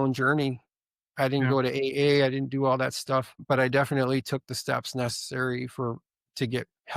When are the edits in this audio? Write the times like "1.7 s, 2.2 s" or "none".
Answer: 3.4 s